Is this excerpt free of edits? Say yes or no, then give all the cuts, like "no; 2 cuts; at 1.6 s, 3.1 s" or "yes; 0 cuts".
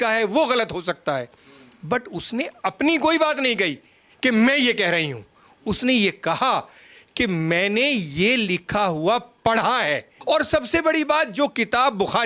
no; 1 cut; at 10.1 s